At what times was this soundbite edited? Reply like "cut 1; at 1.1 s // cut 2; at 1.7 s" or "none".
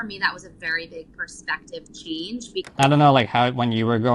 cut 1; at 2.6 s